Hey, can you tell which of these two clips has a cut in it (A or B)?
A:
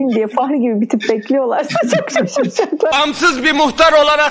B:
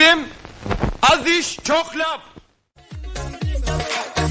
A